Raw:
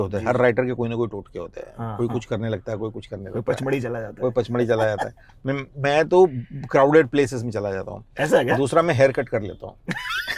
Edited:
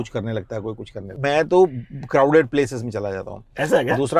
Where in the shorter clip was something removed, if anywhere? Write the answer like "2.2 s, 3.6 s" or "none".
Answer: 1.1 s